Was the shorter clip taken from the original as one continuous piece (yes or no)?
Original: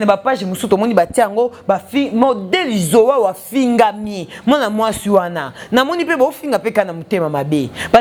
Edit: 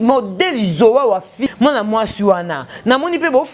no